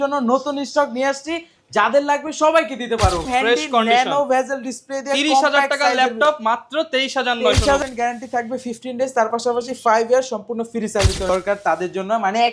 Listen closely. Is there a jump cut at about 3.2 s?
yes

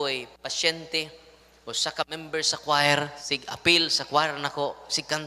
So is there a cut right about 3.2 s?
yes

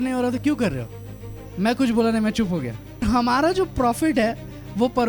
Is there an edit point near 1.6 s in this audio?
no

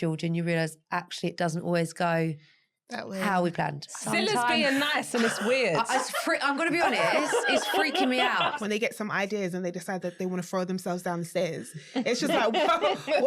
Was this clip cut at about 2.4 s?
no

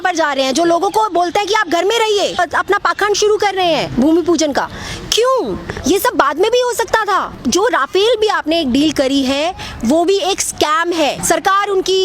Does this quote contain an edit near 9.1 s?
no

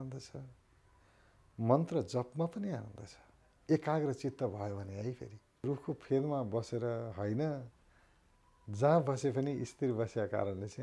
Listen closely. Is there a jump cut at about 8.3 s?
no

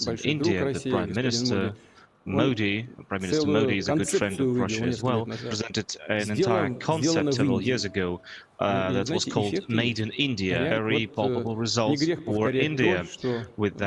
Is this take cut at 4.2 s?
no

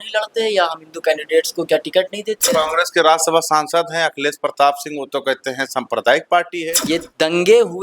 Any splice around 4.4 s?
no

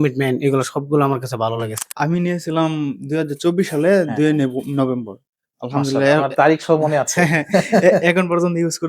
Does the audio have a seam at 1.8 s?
yes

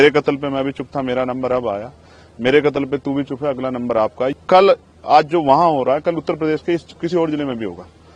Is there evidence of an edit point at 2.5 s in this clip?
no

